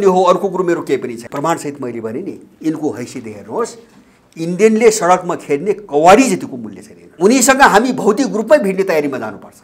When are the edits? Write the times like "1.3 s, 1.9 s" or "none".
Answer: 1.3 s, 7.0 s